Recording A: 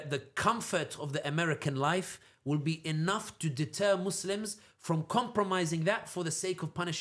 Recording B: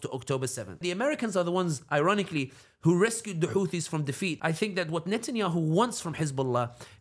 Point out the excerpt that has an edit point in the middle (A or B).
B